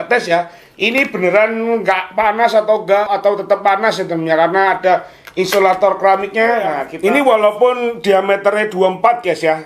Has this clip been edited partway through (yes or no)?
yes